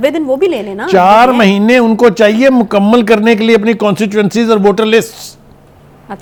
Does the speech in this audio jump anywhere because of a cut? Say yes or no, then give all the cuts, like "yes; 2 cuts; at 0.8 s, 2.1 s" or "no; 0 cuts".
no; 0 cuts